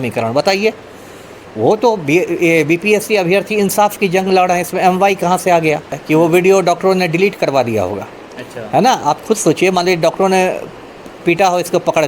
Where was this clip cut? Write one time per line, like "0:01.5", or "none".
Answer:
0:06.0